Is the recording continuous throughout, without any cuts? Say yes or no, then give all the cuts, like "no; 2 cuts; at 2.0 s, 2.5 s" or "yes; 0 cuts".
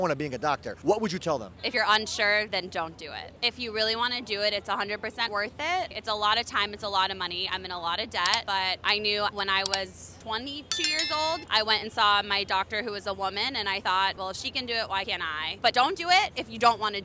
yes; 0 cuts